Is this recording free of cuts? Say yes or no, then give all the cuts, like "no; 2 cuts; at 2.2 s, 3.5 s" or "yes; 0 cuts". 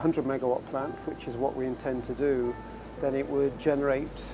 yes; 0 cuts